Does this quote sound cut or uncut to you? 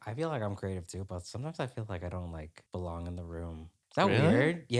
cut